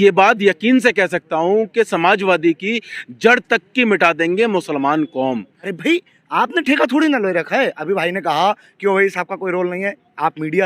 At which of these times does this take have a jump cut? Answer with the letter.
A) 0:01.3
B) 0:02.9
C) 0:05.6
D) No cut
C